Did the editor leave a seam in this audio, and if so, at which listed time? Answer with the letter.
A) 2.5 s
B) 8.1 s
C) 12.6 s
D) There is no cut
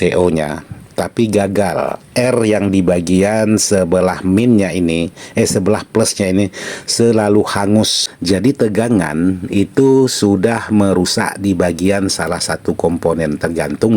B